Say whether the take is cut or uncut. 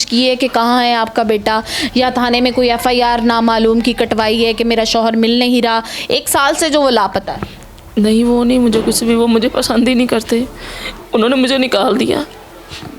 uncut